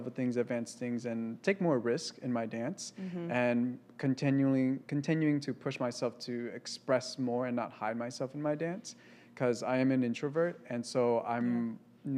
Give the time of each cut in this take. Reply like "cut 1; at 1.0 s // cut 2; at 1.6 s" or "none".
none

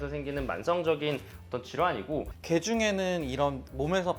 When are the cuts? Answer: cut 1; at 2.3 s

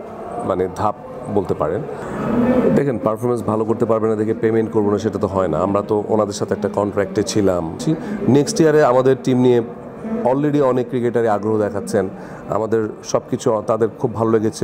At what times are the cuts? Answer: cut 1; at 2.1 s // cut 2; at 7.8 s

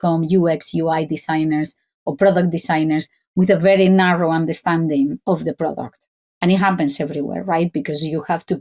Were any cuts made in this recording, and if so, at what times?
none

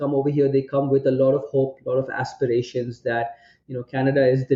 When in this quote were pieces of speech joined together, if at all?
none

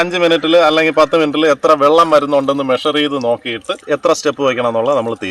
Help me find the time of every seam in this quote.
cut 1; at 3.7 s

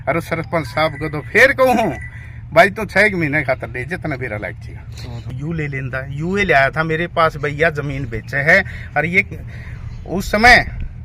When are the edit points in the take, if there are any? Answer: cut 1; at 5.2 s

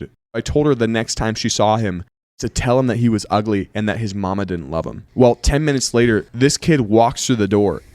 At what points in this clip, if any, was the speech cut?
cut 1; at 6.3 s

